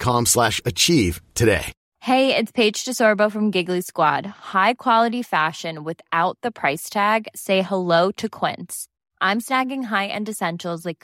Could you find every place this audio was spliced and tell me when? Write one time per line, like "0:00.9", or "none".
0:01.8